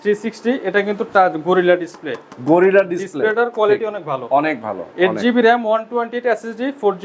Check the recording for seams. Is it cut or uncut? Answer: uncut